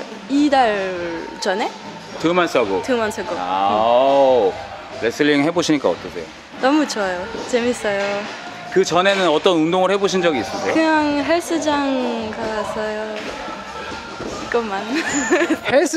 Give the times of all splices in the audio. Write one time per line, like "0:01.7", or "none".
none